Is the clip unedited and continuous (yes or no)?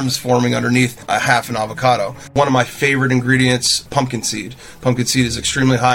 no